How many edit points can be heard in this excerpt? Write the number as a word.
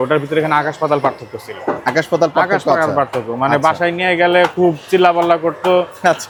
zero